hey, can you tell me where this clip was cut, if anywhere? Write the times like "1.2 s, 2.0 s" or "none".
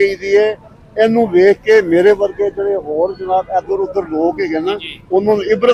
none